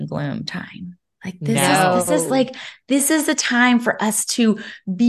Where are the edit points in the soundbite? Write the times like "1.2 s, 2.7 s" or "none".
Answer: none